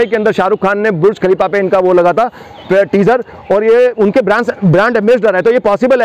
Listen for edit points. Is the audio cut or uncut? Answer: uncut